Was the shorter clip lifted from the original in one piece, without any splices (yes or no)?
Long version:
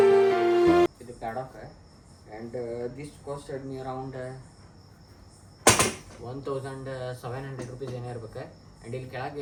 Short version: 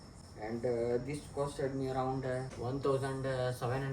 no